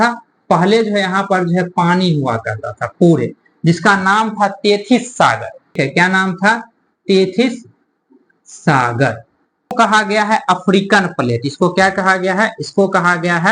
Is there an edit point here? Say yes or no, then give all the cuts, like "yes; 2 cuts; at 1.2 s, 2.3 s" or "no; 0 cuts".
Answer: yes; 2 cuts; at 5.7 s, 9.7 s